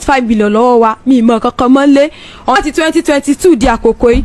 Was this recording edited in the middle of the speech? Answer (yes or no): yes